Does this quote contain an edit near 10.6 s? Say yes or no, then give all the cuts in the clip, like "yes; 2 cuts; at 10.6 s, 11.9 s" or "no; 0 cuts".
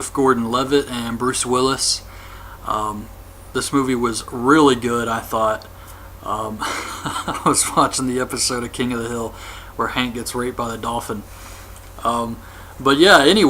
yes; 1 cut; at 10.6 s